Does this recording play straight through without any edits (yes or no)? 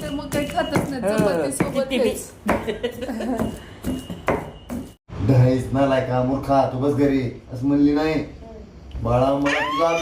no